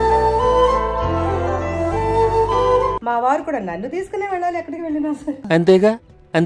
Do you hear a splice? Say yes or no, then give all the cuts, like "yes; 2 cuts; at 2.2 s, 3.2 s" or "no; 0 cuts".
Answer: yes; 2 cuts; at 3.0 s, 5.4 s